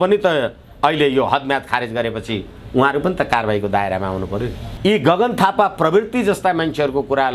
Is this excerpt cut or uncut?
cut